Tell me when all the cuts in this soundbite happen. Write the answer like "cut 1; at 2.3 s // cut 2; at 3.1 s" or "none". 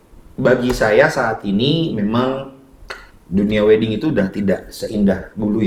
none